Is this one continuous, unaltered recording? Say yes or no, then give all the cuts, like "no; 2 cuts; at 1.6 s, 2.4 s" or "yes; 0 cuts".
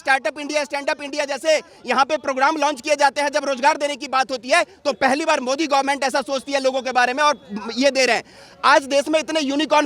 yes; 0 cuts